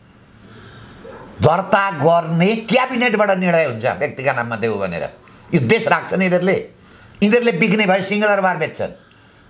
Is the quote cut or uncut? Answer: uncut